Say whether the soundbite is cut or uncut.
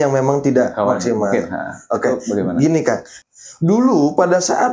cut